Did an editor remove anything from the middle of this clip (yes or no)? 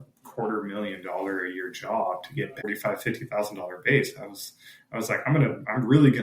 yes